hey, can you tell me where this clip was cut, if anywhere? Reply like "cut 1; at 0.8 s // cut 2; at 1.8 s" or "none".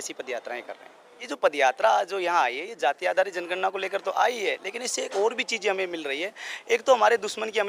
cut 1; at 1.2 s